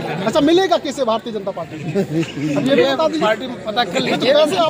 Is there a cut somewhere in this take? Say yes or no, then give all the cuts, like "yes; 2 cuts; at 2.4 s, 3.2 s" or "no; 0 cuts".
no; 0 cuts